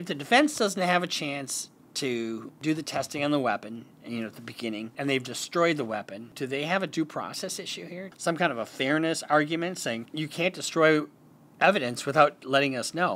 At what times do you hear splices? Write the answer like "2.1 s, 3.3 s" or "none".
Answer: 2.5 s, 4.9 s, 6.2 s, 8.0 s, 10.1 s